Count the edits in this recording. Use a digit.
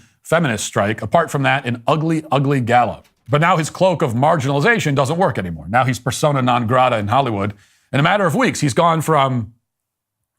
2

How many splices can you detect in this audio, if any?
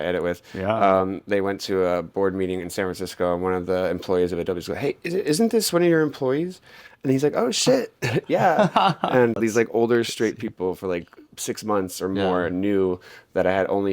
1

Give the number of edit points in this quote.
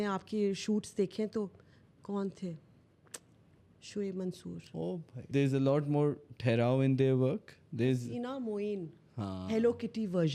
1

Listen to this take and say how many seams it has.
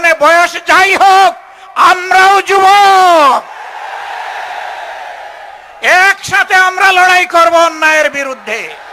0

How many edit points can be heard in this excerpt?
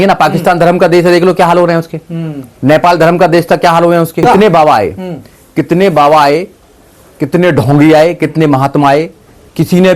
1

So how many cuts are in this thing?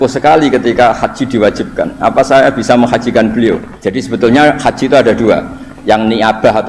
1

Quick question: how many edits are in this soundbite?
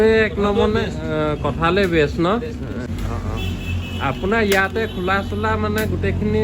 1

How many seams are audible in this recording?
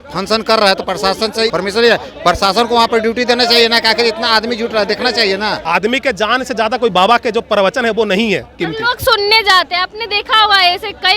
2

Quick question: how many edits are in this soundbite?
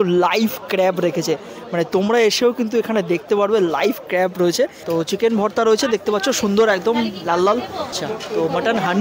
2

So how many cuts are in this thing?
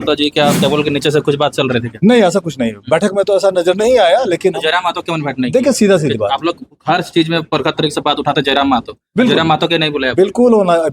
0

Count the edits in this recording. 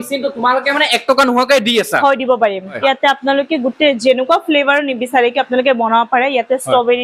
1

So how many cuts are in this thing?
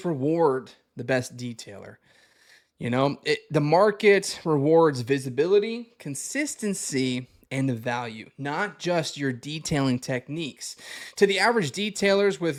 0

